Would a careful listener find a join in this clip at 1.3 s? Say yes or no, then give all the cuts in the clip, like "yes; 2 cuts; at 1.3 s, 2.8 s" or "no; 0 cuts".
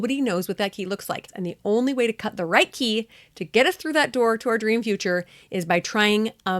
yes; 1 cut; at 1.3 s